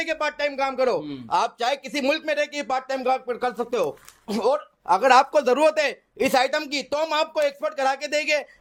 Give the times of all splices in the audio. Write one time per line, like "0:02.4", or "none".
none